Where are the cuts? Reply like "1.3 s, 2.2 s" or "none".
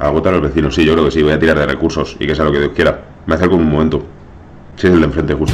none